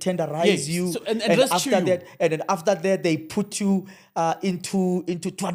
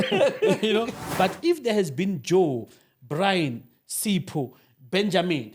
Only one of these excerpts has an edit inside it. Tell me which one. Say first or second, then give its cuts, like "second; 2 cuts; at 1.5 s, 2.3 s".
second; 1 cut; at 1.0 s